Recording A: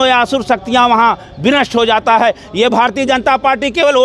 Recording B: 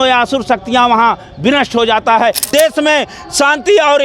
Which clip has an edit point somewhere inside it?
B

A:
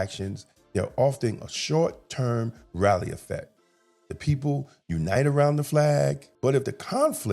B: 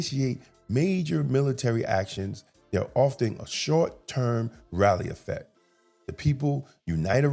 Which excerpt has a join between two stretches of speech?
A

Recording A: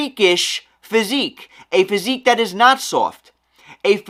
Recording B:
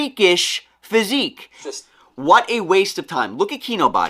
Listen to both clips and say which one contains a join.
B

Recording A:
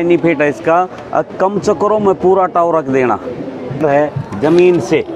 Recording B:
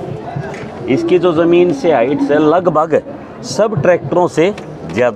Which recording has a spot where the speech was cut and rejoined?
A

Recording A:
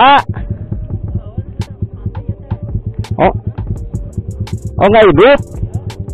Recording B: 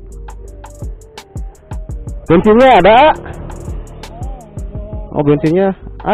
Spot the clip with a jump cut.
B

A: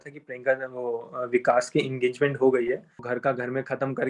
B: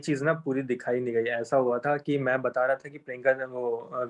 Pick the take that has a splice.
A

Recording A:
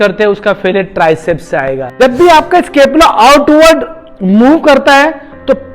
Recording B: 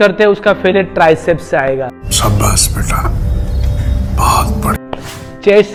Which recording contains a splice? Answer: A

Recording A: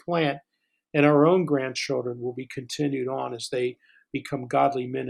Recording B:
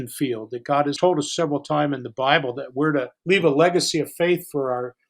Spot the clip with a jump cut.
B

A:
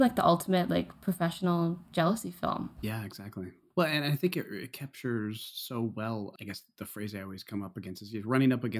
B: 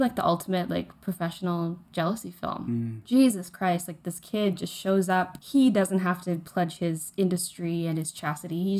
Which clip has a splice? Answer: B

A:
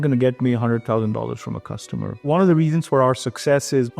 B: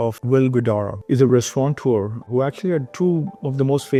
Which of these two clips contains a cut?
A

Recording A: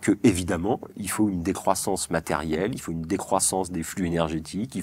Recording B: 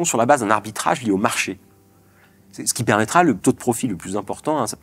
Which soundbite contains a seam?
B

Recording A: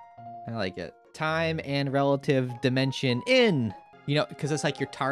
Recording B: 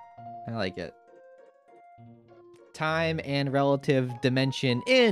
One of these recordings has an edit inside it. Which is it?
A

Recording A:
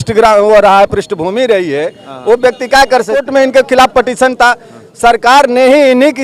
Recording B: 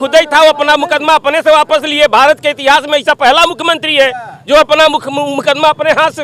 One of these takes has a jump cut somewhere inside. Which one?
A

